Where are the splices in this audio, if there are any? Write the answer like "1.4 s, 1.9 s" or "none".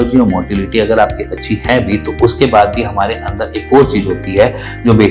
none